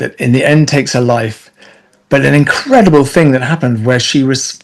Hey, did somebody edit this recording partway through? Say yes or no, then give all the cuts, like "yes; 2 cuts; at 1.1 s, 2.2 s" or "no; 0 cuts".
no; 0 cuts